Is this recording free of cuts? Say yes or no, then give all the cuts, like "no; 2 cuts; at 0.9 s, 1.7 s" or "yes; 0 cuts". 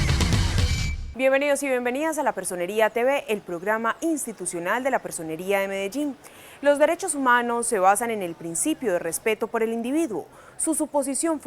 no; 1 cut; at 3.9 s